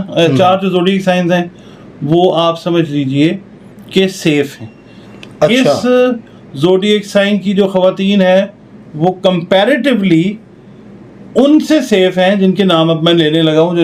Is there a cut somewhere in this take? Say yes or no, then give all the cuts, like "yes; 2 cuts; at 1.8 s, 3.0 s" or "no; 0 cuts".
no; 0 cuts